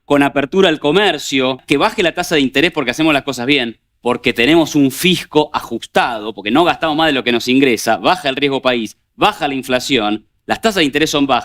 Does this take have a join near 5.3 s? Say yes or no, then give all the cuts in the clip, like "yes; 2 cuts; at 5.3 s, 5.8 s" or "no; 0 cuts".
no; 1 cut; at 1.6 s